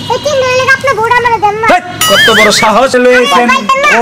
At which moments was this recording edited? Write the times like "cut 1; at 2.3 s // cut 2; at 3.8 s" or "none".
cut 1; at 2.9 s